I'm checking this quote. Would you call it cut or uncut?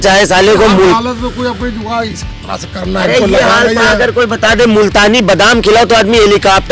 uncut